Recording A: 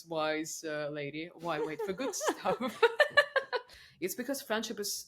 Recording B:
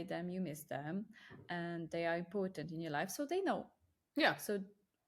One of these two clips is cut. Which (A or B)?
A